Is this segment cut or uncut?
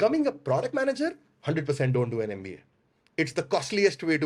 uncut